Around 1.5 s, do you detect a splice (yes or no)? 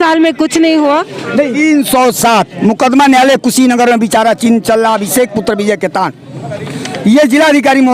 yes